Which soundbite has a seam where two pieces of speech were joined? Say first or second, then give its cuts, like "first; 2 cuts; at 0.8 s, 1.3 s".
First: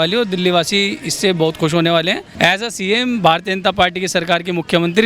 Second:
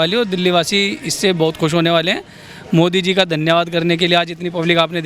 first; 1 cut; at 2.3 s